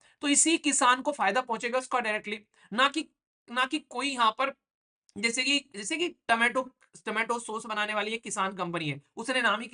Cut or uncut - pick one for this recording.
uncut